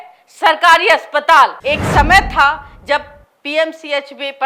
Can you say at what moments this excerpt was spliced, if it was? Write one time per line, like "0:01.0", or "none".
0:01.6